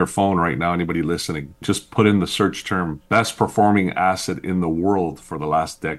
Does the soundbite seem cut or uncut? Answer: cut